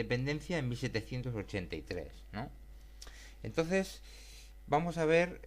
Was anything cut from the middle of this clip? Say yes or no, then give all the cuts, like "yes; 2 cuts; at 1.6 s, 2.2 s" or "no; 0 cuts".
yes; 1 cut; at 3.0 s